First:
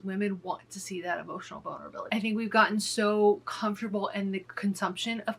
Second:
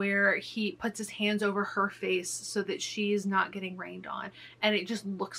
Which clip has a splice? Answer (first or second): first